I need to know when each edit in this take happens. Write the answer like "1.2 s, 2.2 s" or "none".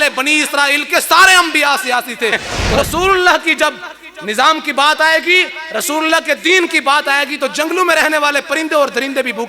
2.5 s